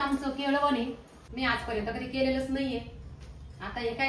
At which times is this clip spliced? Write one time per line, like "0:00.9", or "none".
0:01.2